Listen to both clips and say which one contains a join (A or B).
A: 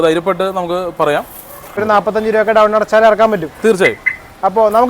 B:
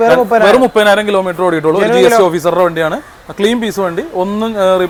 A